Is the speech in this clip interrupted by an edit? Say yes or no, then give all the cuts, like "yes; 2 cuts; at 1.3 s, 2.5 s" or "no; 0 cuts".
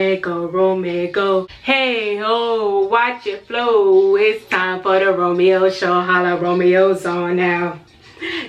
yes; 1 cut; at 1.5 s